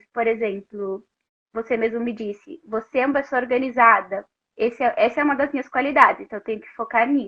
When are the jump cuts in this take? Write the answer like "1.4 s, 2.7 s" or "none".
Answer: none